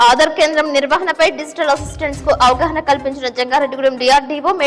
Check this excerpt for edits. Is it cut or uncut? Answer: uncut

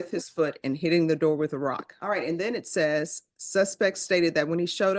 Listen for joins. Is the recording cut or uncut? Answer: cut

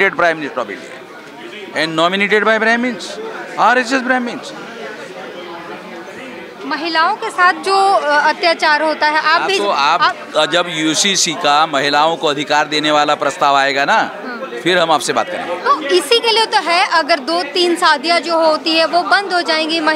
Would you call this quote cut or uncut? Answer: uncut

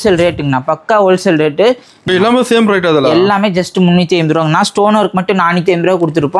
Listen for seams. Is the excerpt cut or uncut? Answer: cut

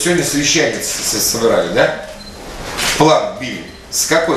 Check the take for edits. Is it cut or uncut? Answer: uncut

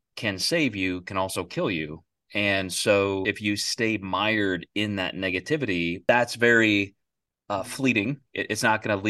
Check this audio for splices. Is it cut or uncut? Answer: cut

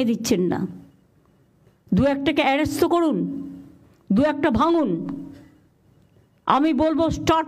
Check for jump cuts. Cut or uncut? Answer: uncut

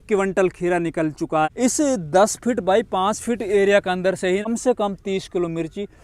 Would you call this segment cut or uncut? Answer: cut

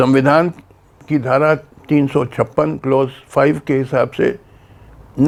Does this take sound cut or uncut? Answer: uncut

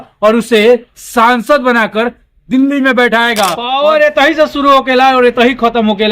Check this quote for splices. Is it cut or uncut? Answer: cut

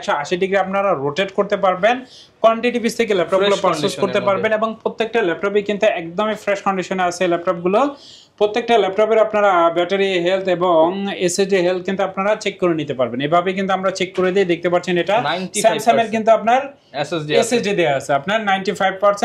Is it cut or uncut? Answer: uncut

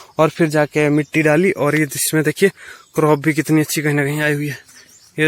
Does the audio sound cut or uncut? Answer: uncut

